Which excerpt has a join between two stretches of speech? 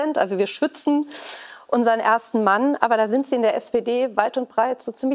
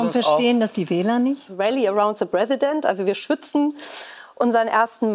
second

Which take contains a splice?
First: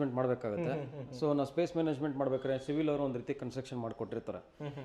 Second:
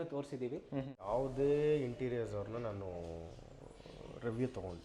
second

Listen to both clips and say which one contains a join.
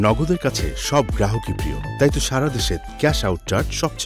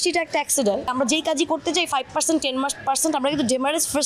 second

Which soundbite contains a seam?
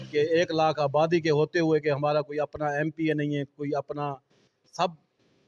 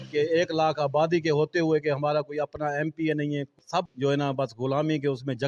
second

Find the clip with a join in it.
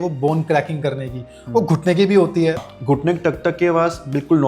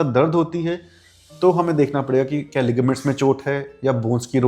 first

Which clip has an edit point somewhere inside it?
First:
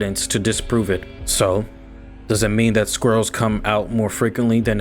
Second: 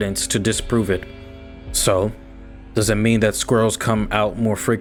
first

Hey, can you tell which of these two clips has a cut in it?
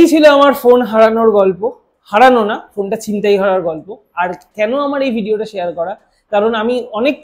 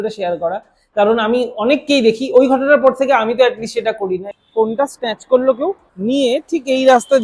second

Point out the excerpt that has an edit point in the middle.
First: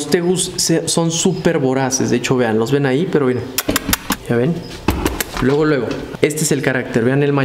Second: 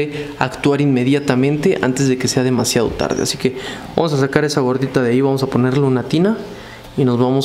first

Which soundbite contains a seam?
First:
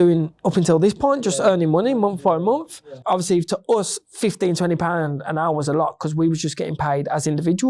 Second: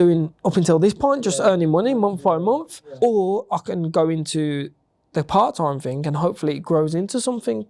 first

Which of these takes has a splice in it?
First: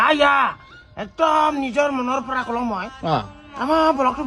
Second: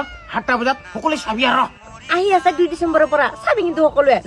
second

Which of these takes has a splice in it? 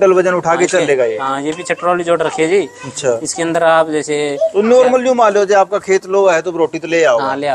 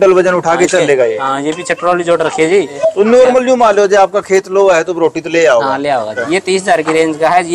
second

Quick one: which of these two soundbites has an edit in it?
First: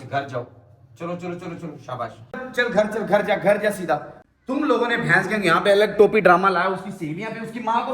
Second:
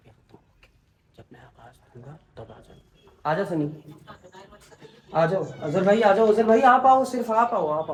first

